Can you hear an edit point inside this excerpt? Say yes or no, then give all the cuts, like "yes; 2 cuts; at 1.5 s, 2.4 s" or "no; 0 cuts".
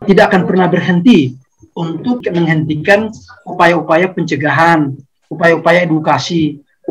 yes; 1 cut; at 2.2 s